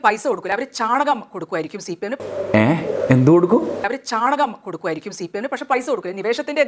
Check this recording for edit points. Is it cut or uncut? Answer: uncut